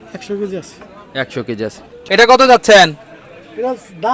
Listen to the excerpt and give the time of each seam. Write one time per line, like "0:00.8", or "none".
0:01.9